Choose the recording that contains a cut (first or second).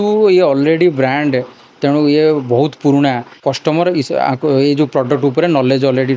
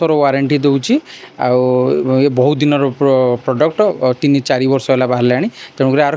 first